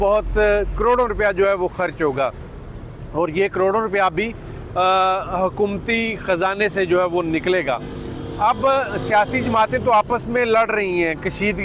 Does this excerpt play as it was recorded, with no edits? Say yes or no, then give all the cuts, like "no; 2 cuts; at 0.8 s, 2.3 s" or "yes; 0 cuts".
yes; 0 cuts